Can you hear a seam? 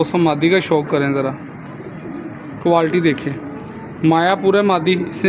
no; 0 cuts

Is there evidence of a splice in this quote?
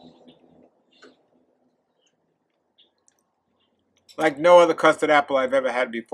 no; 0 cuts

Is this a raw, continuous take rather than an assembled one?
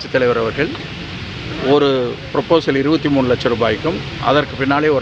yes; 0 cuts

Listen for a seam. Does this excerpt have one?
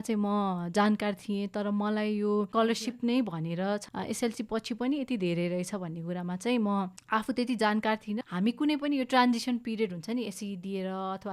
yes; 3 cuts; at 2.5 s, 3.8 s, 8.2 s

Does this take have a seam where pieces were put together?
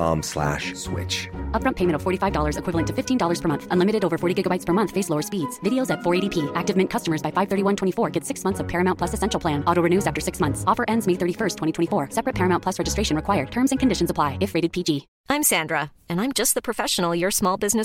yes; 1 cut; at 15.1 s

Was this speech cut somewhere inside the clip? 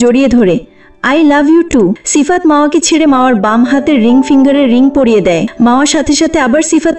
yes; 2 cuts; at 2.0 s, 5.5 s

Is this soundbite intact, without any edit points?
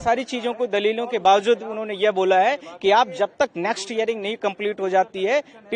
yes; 0 cuts

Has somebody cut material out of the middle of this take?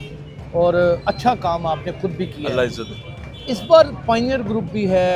no; 0 cuts

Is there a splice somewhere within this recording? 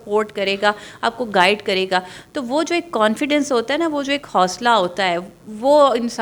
no; 0 cuts

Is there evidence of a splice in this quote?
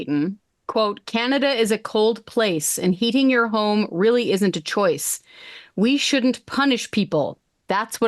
no; 0 cuts

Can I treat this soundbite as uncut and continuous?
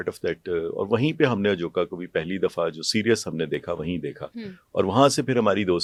yes; 0 cuts

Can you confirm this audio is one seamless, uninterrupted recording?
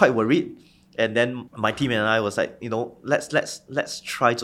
no; 1 cut; at 1.4 s

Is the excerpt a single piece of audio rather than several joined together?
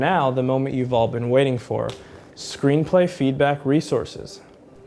yes; 0 cuts

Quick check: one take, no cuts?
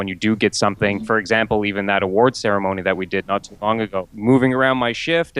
no; 2 cuts; at 1.0 s, 4.1 s

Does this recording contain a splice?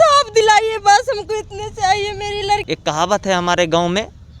yes; 1 cut; at 2.6 s

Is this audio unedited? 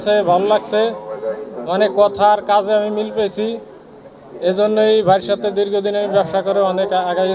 yes; 0 cuts

